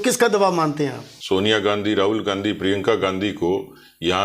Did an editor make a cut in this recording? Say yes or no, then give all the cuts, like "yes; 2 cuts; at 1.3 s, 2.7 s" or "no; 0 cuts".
yes; 1 cut; at 1.1 s